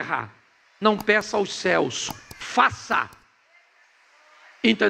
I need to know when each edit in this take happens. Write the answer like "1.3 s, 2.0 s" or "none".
none